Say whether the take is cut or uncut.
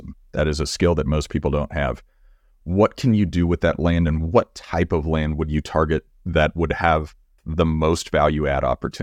cut